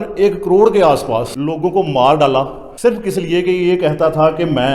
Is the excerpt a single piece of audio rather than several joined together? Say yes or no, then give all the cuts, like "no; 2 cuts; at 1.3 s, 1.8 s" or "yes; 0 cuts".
yes; 0 cuts